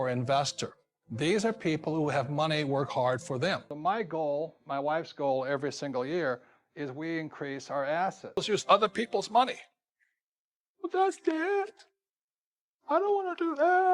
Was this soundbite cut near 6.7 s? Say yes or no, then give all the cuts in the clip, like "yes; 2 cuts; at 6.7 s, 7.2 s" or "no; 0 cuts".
no; 2 cuts; at 3.7 s, 8.4 s